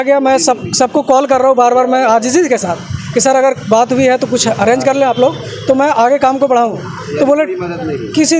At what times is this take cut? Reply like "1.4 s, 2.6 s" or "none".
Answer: none

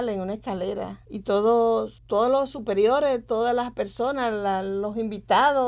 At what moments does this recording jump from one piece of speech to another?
1.0 s, 2.0 s

